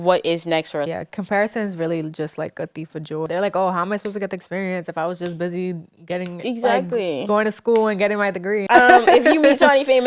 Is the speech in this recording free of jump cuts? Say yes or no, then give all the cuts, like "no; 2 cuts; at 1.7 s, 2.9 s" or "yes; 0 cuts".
no; 3 cuts; at 0.9 s, 3.3 s, 8.6 s